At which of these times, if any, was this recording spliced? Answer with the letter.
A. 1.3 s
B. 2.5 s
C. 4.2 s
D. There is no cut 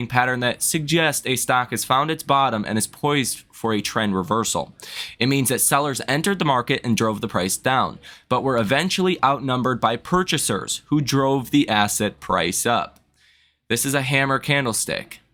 D